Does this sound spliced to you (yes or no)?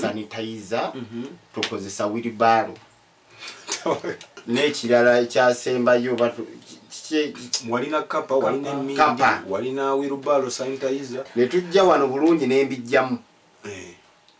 no